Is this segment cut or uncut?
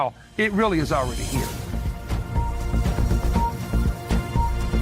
cut